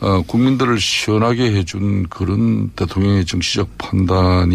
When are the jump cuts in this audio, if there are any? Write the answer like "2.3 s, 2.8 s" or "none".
3.0 s